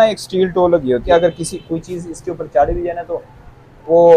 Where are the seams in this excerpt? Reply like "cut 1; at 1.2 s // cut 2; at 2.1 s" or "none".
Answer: cut 1; at 1.0 s